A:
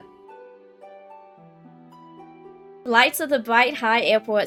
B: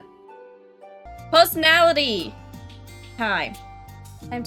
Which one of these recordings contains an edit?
B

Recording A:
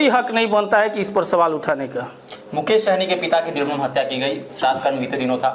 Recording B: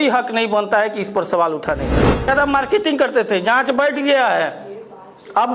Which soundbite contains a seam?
B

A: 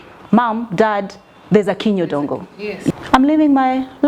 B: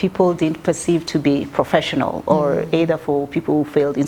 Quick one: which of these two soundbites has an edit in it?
A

